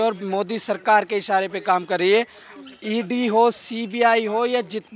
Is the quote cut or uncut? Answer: uncut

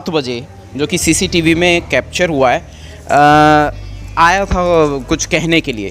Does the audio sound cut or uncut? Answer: uncut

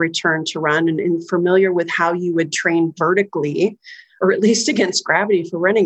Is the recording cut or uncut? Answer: cut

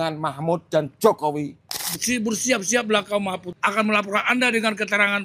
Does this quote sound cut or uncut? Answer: cut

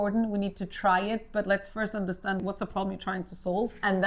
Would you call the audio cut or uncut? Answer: cut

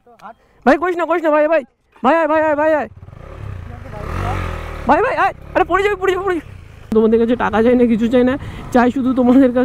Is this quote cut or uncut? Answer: cut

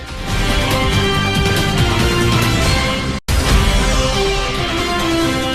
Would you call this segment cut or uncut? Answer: uncut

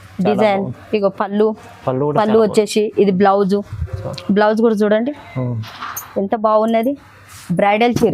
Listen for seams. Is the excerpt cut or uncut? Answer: cut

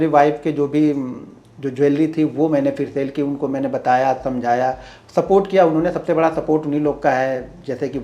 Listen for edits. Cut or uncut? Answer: uncut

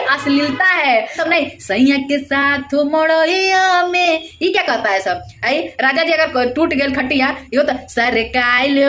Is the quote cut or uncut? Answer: cut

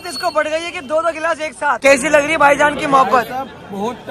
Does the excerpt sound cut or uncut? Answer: cut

